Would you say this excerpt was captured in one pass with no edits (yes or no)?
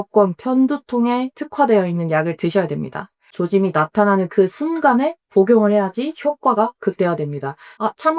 no